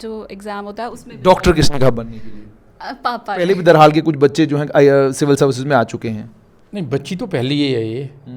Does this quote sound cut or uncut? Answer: cut